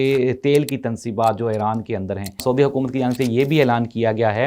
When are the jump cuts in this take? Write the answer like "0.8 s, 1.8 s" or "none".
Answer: 2.4 s